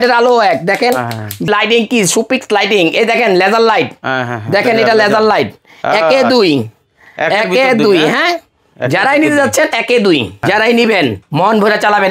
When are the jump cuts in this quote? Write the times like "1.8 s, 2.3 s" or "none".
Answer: 1.5 s, 10.3 s